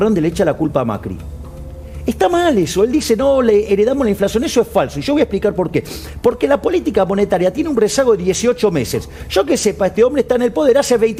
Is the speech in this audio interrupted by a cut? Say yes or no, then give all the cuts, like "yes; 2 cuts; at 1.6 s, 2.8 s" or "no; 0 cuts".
no; 0 cuts